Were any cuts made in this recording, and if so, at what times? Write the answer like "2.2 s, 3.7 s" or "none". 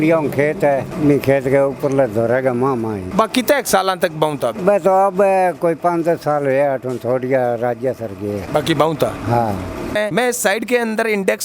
9.9 s